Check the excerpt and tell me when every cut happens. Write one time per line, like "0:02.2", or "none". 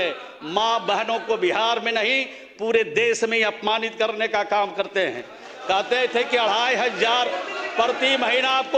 none

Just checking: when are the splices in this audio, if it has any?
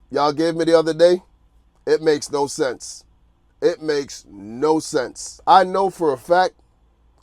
0:05.2

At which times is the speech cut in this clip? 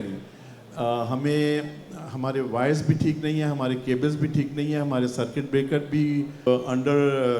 0:06.5

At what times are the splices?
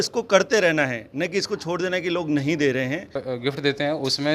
0:03.2

